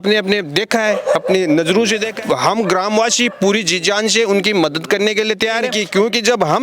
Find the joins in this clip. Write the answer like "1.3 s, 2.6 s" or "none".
2.1 s, 5.8 s

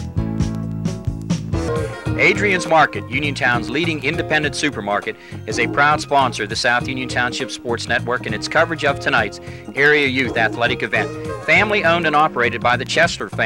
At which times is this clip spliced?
1.7 s

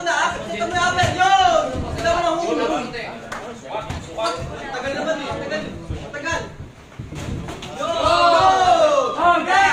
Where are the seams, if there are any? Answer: none

